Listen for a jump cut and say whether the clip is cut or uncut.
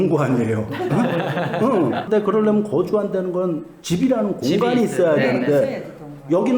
cut